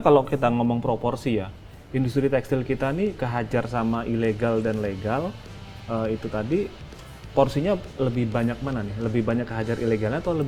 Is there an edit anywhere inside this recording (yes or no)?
no